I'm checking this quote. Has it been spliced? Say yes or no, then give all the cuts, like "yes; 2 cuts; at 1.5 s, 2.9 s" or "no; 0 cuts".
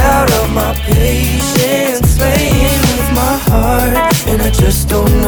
no; 0 cuts